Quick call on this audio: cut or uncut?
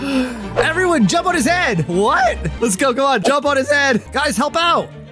cut